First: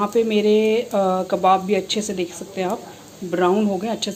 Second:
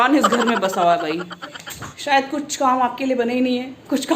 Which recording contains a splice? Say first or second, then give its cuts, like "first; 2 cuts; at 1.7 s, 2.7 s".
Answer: second; 1 cut; at 1.9 s